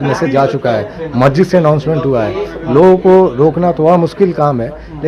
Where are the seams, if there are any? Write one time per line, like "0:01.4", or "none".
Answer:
none